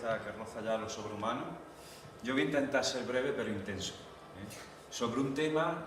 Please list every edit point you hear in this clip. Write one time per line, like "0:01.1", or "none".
0:01.9